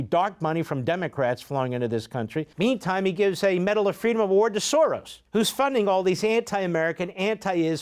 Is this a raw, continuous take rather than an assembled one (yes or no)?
no